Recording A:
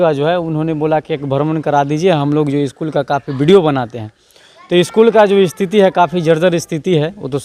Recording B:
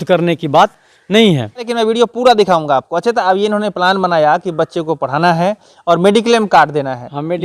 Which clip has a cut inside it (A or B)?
B